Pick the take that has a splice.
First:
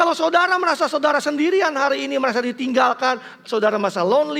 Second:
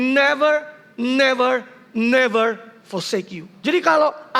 second; 1 cut; at 3.4 s

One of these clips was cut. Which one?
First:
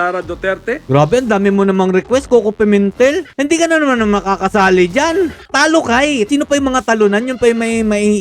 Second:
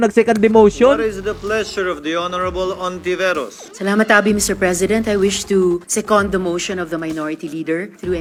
first; 4 cuts; at 0.8 s, 3.3 s, 5.4 s, 6.3 s

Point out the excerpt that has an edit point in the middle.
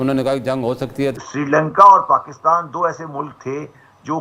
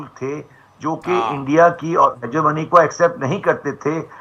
first; 1 cut; at 1.2 s

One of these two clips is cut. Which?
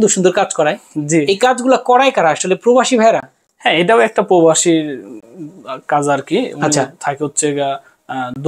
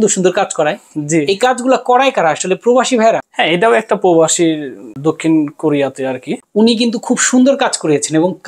second; 3 cuts; at 3.3 s, 4.8 s, 6.3 s

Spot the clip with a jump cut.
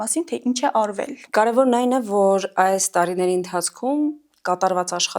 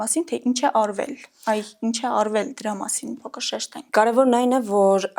first; 1 cut; at 1.2 s

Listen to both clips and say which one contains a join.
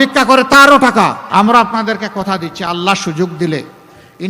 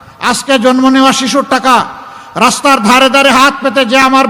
first; 1 cut; at 1.2 s

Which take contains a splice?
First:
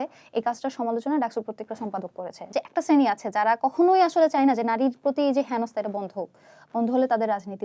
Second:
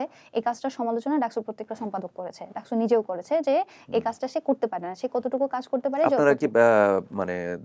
first; 1 cut; at 2.6 s

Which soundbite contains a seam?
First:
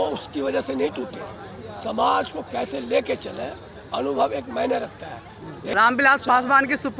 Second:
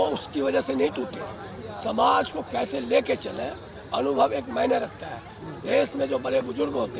first; 1 cut; at 5.5 s

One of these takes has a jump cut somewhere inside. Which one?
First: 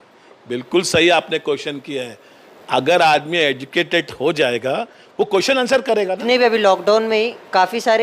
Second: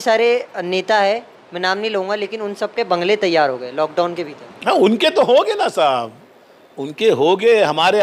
first; 1 cut; at 6.2 s

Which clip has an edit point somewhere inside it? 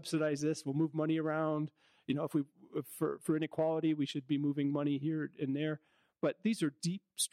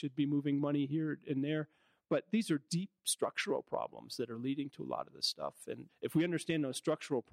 second; 1 cut; at 5.9 s

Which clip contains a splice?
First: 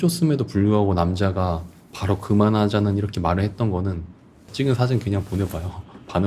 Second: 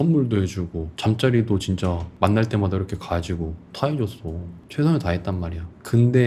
first; 1 cut; at 4.5 s

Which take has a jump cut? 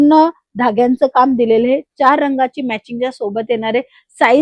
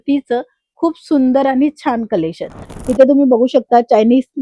second; 1 cut; at 2.7 s

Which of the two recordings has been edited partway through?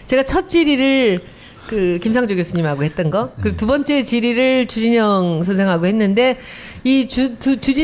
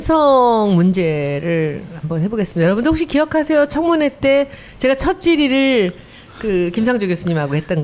second; 1 cut; at 2.0 s

